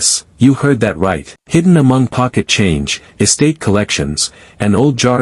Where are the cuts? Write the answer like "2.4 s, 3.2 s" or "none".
1.3 s